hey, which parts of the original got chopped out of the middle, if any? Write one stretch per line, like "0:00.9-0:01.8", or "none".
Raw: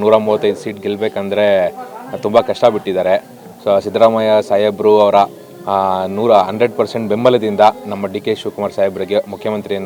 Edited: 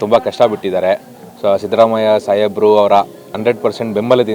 0:05.6-0:06.5